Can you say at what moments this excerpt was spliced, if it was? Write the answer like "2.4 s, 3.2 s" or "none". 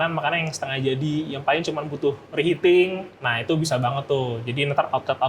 3.1 s

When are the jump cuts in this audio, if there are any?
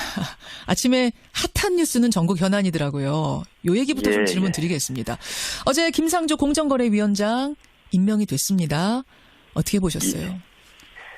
7.1 s

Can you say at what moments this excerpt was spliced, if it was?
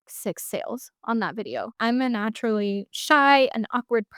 1.7 s

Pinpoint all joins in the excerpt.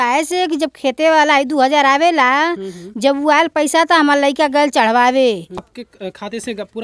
5.7 s

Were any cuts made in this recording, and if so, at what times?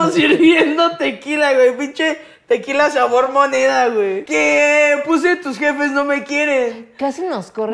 4.2 s

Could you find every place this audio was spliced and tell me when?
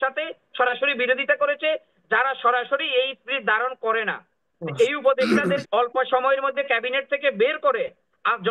5.6 s

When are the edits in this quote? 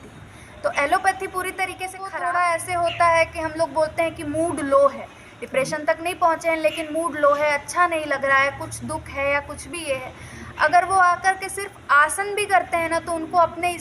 2.1 s

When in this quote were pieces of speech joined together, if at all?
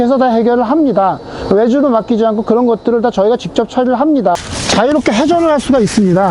4.5 s

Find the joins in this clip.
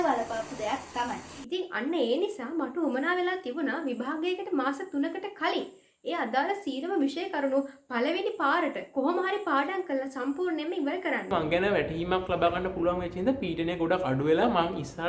1.3 s, 11.3 s

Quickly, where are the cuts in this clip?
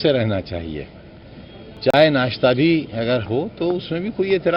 none

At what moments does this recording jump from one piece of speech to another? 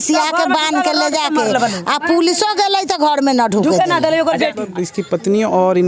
4.6 s

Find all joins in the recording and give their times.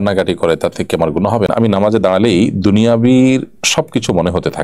1.5 s

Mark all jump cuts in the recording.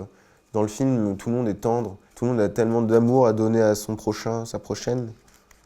2.0 s

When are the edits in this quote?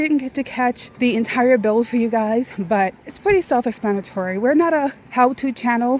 0.9 s, 3.1 s, 5.0 s

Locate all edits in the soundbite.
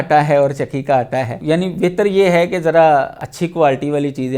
1.4 s, 3.2 s

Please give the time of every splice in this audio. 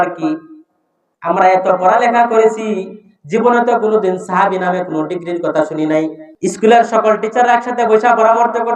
6.2 s

